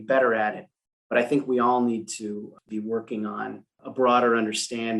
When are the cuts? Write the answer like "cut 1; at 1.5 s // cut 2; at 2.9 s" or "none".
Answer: cut 1; at 2.6 s // cut 2; at 3.7 s